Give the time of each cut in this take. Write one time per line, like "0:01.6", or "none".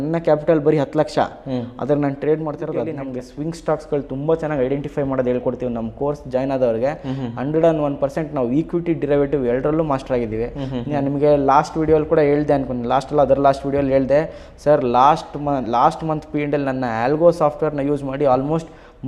0:03.0